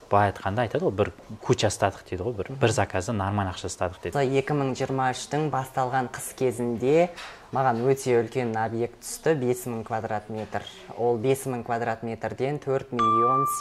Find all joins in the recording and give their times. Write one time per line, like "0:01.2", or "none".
0:04.1